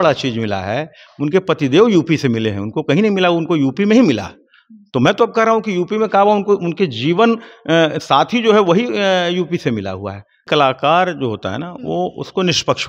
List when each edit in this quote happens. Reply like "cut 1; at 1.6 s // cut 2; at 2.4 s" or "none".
cut 1; at 10.4 s